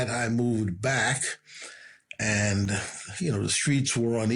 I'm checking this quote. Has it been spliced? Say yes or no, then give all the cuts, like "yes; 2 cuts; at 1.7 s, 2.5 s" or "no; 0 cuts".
no; 0 cuts